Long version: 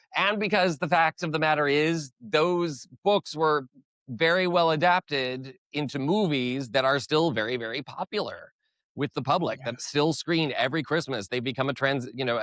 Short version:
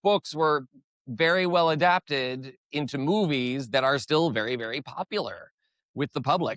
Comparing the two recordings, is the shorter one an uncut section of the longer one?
yes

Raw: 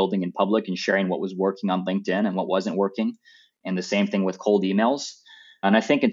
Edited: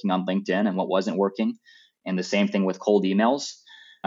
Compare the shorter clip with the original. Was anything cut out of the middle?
no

